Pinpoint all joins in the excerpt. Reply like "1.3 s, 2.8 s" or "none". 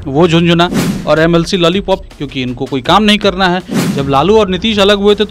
3.8 s